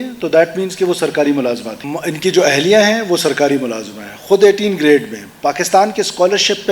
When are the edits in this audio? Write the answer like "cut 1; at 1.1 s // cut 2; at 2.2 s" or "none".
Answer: cut 1; at 1.8 s